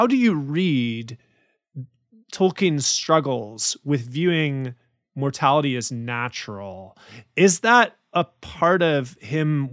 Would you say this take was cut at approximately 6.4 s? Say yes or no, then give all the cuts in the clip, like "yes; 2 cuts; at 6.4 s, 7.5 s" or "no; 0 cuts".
no; 0 cuts